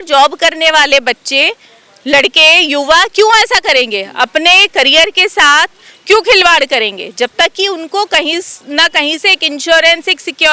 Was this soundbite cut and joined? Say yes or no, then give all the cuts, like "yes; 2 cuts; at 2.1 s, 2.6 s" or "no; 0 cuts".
no; 0 cuts